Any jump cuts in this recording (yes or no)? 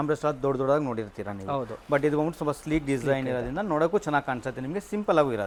no